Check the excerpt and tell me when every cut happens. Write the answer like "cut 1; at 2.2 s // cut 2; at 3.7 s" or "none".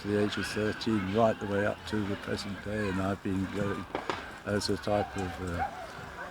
none